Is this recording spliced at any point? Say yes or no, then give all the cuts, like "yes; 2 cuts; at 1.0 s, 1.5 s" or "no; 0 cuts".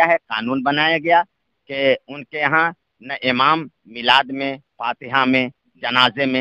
no; 0 cuts